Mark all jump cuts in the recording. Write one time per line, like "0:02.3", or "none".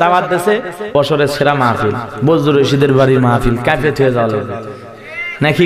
0:00.9